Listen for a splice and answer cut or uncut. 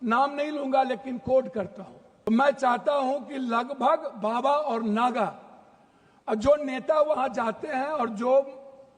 cut